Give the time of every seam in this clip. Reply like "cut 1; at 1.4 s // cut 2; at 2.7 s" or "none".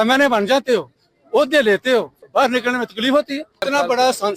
cut 1; at 2.2 s // cut 2; at 3.6 s